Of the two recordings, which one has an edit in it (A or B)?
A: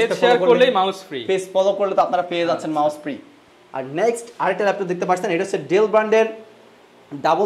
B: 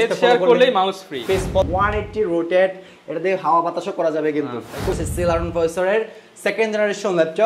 B